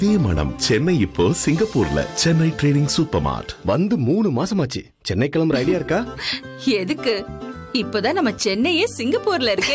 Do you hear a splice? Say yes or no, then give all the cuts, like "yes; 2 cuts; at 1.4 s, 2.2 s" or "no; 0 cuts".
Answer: no; 0 cuts